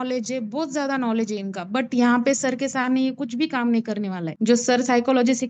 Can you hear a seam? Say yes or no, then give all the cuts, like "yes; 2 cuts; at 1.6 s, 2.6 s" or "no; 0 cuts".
no; 0 cuts